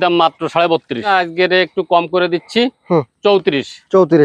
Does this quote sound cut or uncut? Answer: cut